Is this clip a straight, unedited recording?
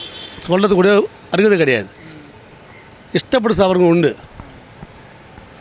yes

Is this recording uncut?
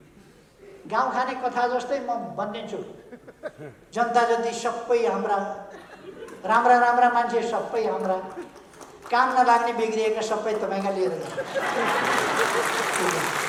yes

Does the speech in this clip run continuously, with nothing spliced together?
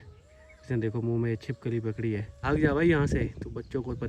yes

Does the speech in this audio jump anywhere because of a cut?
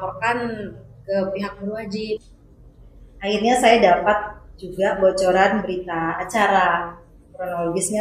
yes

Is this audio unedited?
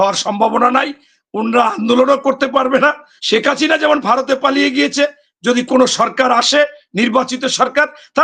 no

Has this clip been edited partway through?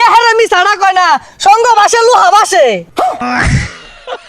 yes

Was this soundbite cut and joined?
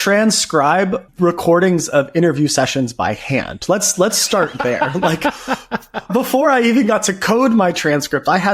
yes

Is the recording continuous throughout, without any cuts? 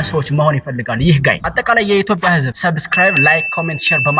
no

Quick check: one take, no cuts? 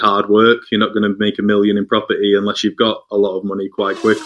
yes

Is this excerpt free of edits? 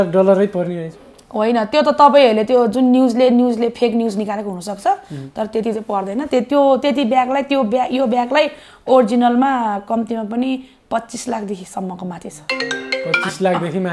yes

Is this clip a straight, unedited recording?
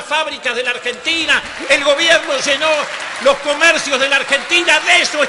yes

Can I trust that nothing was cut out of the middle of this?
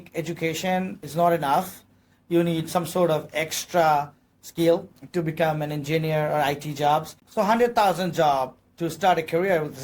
no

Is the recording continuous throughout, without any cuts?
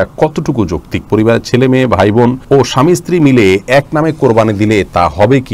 no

